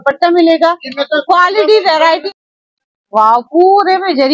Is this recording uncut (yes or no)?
no